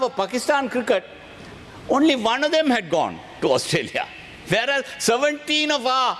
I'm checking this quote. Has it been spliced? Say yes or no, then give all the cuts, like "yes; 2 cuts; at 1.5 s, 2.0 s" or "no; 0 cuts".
no; 0 cuts